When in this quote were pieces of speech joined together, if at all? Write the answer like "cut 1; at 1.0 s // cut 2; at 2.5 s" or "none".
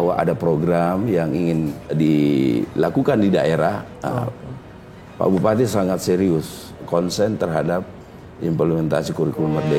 cut 1; at 1.9 s